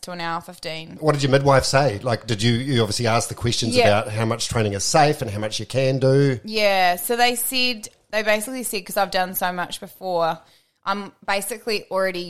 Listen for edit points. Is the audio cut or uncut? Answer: cut